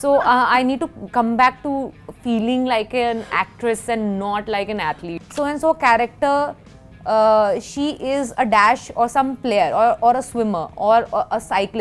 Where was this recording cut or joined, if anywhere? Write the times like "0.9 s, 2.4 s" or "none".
5.1 s